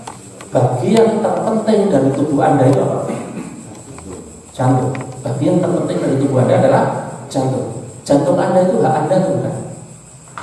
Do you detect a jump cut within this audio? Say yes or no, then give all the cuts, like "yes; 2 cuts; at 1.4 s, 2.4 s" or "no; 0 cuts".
no; 0 cuts